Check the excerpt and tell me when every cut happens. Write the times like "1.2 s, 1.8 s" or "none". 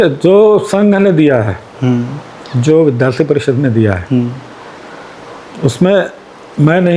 none